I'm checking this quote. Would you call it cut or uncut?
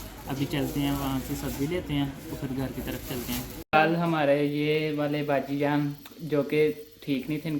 cut